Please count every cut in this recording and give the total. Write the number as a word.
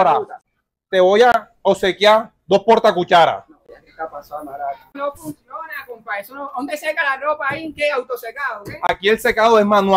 one